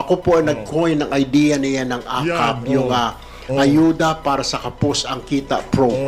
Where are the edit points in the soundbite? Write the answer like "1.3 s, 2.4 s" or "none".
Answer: none